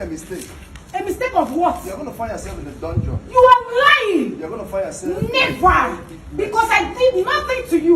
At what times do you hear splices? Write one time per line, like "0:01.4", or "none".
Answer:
0:04.2